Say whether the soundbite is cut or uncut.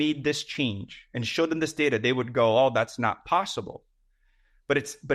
uncut